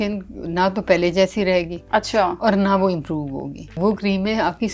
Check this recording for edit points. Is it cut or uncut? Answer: cut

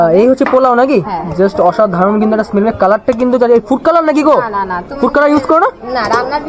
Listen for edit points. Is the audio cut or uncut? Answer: uncut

